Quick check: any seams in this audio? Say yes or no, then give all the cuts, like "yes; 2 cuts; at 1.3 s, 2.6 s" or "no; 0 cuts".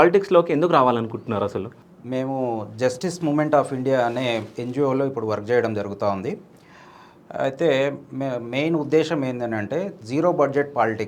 no; 0 cuts